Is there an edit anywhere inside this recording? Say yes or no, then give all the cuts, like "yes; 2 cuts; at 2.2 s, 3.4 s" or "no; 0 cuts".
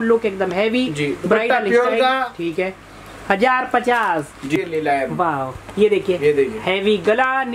yes; 1 cut; at 4.6 s